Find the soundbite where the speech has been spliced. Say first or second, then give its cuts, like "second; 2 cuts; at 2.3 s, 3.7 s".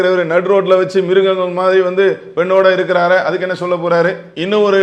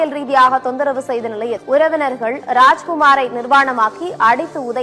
second; 1 cut; at 1.6 s